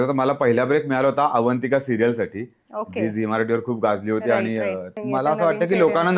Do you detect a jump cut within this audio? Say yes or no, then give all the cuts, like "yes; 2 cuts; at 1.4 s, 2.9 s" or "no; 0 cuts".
yes; 1 cut; at 4.9 s